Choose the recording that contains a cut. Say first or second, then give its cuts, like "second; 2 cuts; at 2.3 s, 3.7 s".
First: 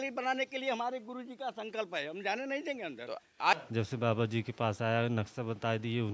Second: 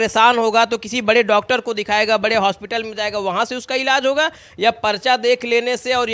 first; 1 cut; at 3.5 s